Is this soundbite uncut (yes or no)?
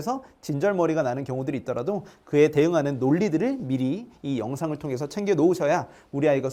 yes